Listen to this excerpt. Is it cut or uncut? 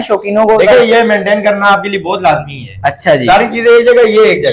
uncut